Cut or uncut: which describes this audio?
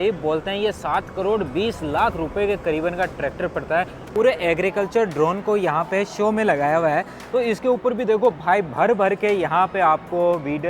cut